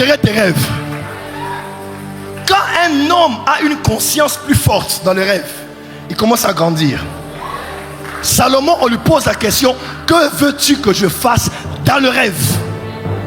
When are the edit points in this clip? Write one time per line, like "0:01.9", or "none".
none